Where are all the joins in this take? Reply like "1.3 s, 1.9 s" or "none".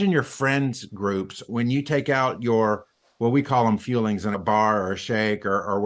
1.5 s, 4.4 s